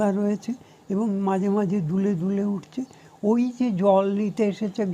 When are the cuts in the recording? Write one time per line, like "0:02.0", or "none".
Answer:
none